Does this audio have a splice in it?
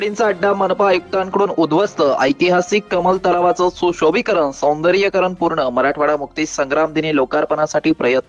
no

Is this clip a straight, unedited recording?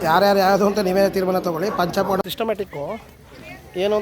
no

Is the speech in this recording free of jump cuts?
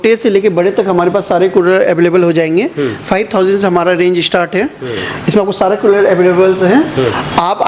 yes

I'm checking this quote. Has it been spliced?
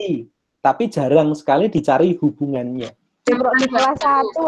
yes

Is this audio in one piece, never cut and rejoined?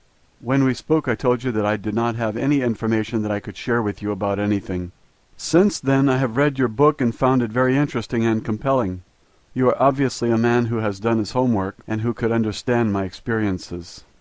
no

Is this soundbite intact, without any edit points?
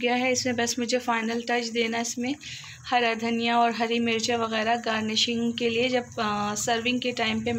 yes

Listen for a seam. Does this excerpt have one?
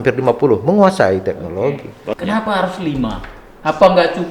yes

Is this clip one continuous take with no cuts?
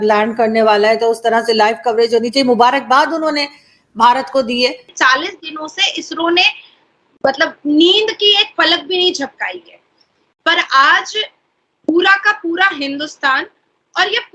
no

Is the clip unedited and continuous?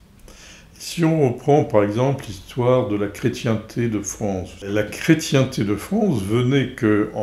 no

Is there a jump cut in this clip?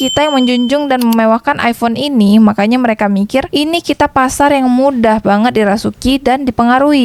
no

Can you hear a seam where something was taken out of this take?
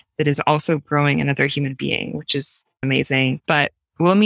yes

